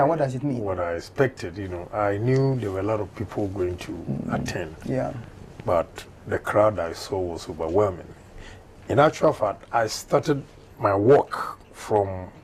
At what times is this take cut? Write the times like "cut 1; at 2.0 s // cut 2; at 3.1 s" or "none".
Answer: cut 1; at 8.6 s

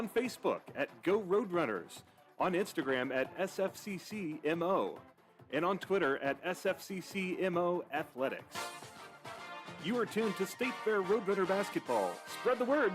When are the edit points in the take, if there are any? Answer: cut 1; at 8.5 s // cut 2; at 9.7 s

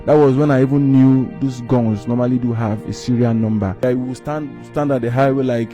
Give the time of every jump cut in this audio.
cut 1; at 3.8 s

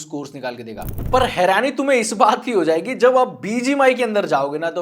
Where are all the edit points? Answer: cut 1; at 0.9 s

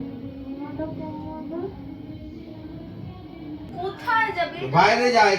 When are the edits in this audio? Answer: cut 1; at 3.7 s

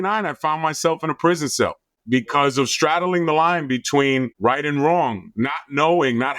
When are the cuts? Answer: cut 1; at 1.9 s // cut 2; at 4.3 s

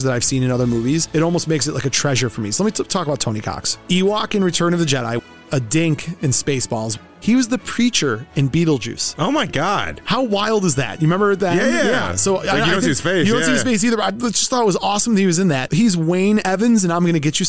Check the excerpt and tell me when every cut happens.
cut 1; at 1.0 s // cut 2; at 5.2 s // cut 3; at 6.9 s

